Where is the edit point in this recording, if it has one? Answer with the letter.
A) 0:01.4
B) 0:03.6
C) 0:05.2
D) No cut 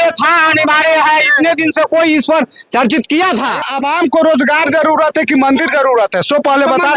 B